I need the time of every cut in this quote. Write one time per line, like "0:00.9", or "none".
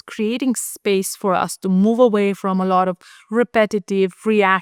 none